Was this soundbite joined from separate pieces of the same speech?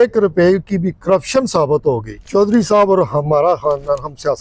yes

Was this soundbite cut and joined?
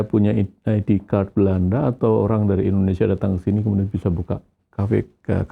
no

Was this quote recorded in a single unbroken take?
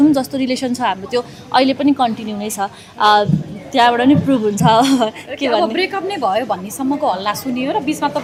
yes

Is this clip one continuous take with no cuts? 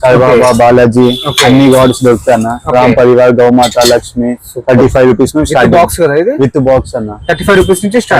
yes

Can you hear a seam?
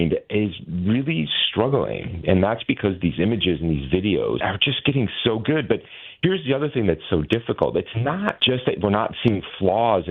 yes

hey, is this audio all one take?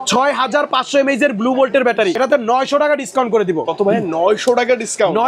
no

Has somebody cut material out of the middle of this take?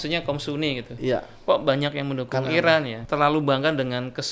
yes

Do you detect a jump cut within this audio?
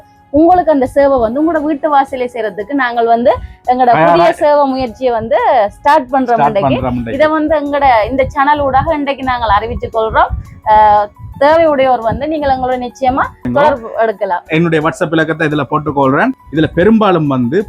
no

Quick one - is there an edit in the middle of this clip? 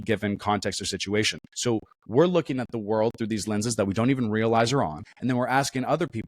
yes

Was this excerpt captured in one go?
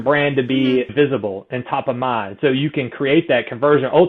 yes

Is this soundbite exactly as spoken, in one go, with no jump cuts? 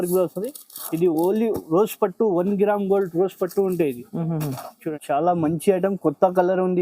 no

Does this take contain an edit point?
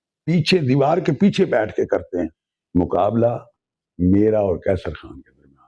yes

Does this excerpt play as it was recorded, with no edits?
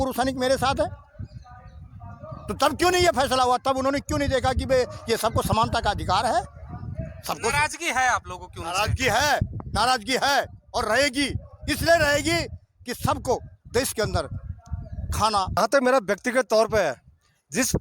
no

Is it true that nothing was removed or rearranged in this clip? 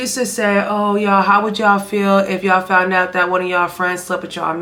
yes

